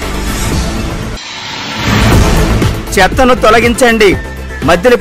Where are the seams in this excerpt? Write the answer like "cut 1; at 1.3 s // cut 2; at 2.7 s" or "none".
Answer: cut 1; at 1.1 s